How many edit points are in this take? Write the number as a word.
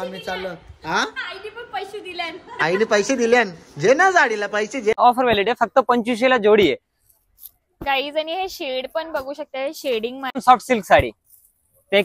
two